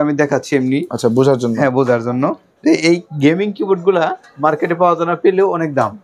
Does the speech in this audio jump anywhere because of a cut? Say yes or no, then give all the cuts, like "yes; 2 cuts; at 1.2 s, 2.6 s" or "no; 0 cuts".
no; 0 cuts